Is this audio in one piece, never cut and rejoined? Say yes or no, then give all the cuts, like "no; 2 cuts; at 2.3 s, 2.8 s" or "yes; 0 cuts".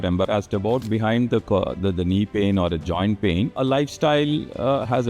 no; 2 cuts; at 0.8 s, 3.5 s